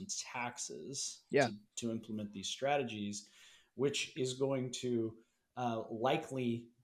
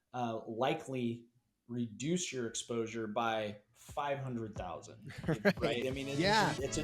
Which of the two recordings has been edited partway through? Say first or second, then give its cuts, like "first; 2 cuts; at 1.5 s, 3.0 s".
second; 1 cut; at 5.8 s